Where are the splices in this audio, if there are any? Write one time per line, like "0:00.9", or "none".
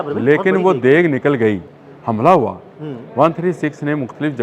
0:01.7